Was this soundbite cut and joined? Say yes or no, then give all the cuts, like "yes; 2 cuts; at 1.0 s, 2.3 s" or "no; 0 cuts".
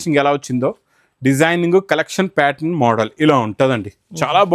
no; 0 cuts